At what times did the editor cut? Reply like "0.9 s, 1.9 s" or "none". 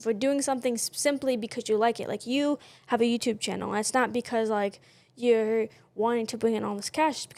none